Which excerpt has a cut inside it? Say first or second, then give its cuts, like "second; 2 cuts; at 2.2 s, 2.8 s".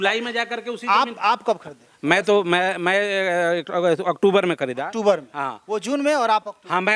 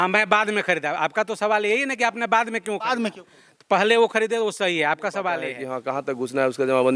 second; 1 cut; at 5.7 s